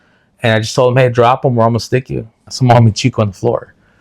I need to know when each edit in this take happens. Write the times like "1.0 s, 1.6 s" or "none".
2.5 s